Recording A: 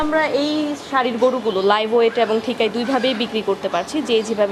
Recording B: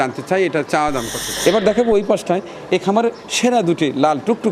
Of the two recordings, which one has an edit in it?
B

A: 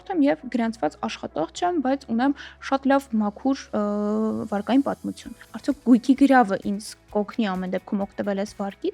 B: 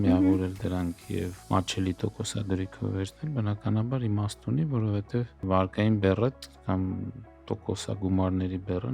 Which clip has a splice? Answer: B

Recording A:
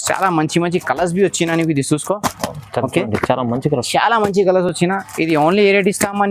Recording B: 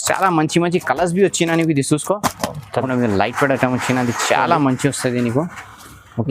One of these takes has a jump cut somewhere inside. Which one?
B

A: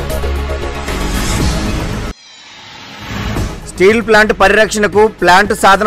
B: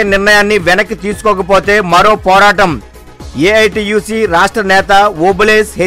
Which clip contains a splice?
A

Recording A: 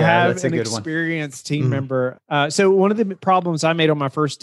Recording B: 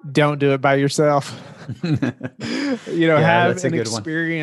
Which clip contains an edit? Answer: A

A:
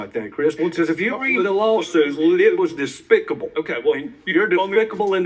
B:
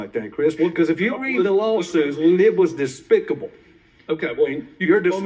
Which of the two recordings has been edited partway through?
A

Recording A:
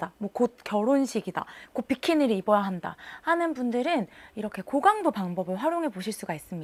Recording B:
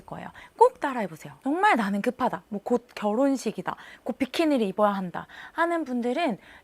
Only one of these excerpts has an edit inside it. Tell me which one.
B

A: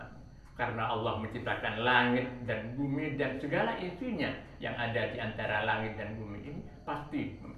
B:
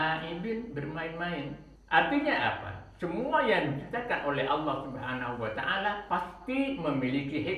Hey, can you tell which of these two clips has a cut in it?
B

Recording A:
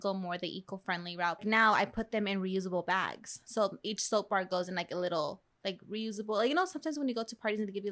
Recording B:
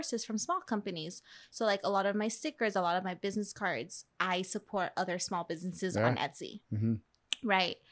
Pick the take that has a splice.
A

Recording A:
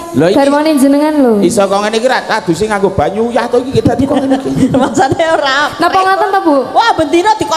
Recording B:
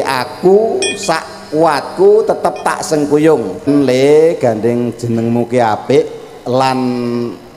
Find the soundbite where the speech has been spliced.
B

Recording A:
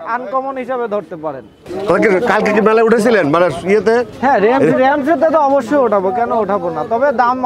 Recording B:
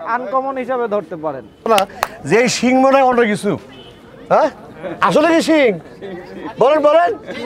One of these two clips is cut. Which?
B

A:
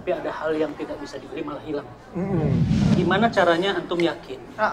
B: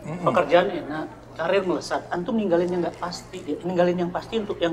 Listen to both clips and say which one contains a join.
A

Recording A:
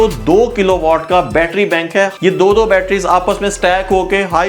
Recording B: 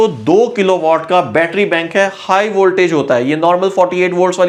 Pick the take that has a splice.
A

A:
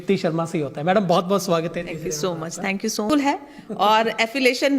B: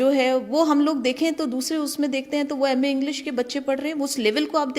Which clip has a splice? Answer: A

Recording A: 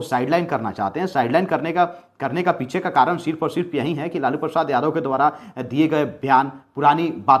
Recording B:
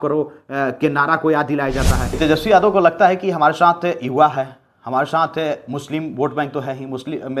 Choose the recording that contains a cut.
B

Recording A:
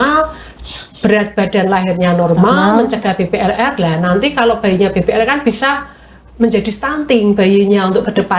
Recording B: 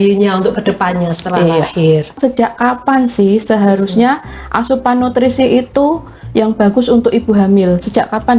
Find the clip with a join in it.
B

